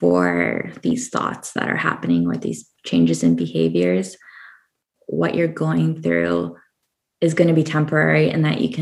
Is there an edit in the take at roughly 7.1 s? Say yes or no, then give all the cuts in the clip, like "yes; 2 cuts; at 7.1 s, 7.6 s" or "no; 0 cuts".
no; 1 cut; at 5.0 s